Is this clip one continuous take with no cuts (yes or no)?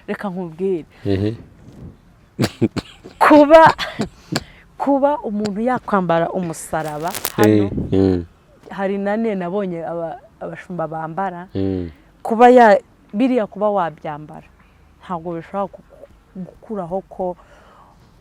yes